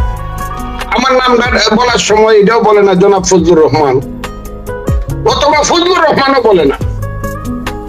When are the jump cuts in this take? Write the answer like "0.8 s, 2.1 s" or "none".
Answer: 6.8 s